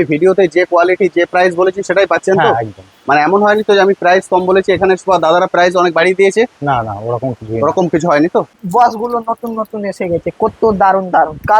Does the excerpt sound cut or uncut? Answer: cut